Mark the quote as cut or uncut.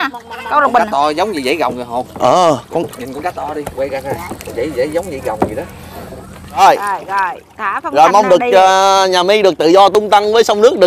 cut